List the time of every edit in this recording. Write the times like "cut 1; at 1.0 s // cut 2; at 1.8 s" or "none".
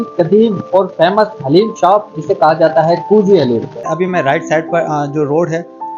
cut 1; at 3.8 s